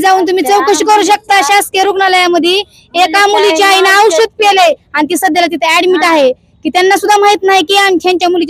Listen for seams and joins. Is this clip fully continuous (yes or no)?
yes